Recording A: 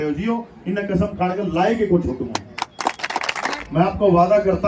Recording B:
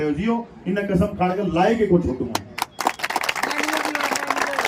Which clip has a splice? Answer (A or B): A